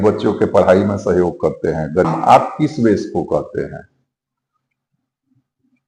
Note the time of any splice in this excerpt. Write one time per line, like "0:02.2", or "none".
0:02.1